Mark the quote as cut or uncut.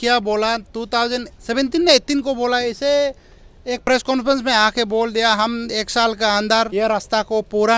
cut